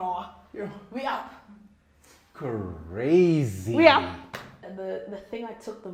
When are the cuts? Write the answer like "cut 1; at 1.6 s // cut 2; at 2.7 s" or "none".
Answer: cut 1; at 4.6 s